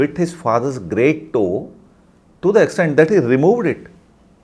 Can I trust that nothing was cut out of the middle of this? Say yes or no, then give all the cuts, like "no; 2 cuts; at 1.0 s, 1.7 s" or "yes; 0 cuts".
yes; 0 cuts